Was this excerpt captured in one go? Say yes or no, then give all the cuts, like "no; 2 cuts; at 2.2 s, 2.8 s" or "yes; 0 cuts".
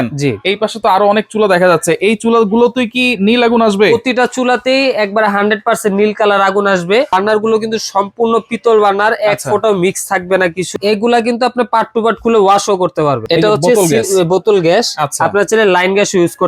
no; 3 cuts; at 7.1 s, 10.7 s, 13.2 s